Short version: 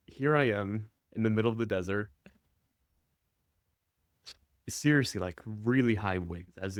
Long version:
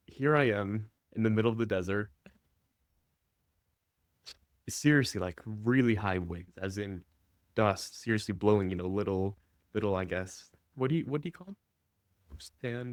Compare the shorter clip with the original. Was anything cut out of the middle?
no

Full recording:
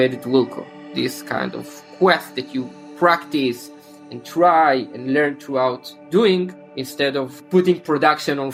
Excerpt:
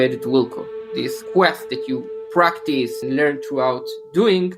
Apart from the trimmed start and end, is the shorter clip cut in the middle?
yes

